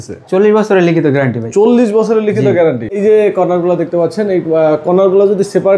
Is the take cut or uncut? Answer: cut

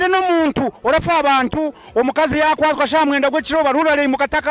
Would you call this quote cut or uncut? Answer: uncut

